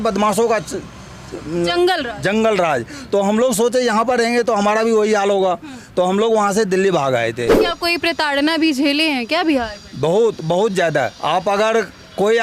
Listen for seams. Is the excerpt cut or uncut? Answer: cut